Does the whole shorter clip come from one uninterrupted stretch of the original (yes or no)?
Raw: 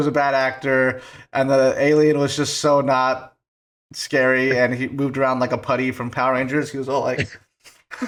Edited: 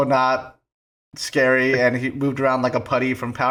yes